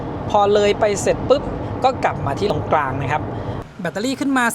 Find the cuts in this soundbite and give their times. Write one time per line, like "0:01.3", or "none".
0:02.5
0:03.6